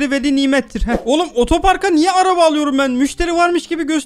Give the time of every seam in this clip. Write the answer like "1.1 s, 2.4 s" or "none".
1.0 s